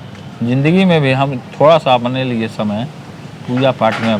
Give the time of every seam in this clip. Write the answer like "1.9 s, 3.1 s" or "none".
none